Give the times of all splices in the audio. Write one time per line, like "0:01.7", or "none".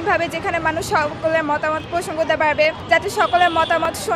0:01.8
0:02.8